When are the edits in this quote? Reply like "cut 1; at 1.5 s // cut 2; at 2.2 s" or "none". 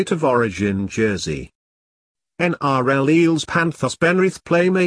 cut 1; at 1.2 s